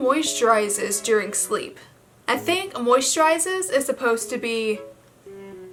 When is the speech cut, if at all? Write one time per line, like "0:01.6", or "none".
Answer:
none